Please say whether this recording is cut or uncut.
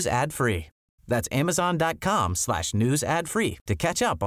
uncut